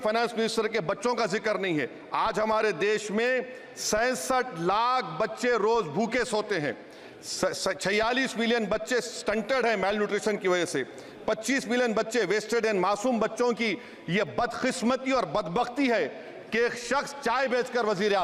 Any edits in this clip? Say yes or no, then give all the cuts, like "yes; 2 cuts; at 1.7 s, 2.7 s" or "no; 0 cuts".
no; 0 cuts